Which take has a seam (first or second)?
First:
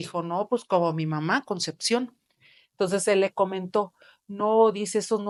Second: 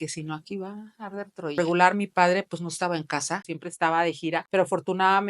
second